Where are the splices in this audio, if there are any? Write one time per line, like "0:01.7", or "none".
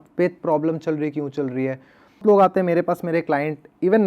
0:02.2

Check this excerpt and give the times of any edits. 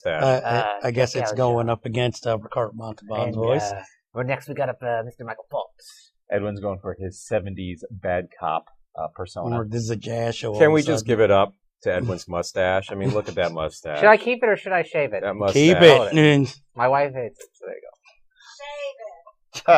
none

